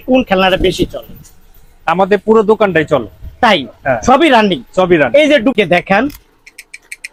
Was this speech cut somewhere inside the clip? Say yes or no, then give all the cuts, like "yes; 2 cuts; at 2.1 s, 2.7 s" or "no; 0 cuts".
no; 0 cuts